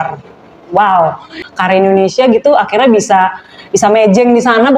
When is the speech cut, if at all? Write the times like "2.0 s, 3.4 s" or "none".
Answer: 1.4 s